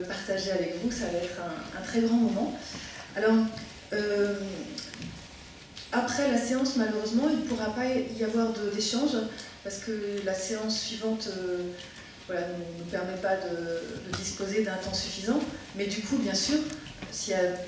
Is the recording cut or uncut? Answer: cut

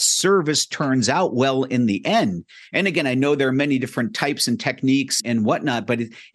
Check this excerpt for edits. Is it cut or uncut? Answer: uncut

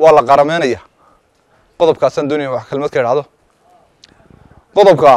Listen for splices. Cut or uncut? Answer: uncut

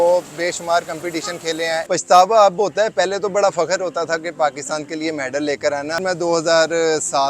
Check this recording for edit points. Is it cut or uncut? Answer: cut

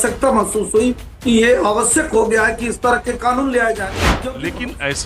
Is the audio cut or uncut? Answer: cut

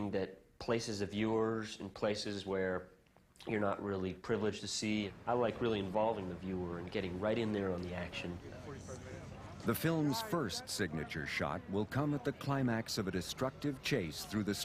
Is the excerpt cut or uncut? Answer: cut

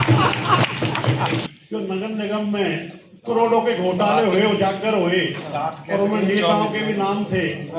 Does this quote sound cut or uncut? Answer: cut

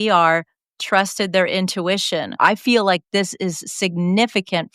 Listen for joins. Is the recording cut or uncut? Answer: cut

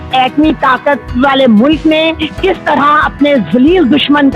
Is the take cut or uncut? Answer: uncut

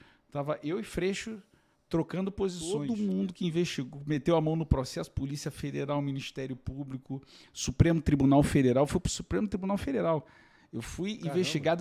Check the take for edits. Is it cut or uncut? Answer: cut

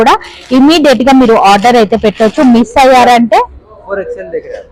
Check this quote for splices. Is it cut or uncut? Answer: uncut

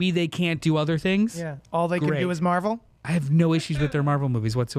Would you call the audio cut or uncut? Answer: cut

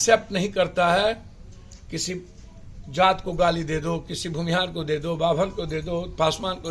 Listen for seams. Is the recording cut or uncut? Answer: uncut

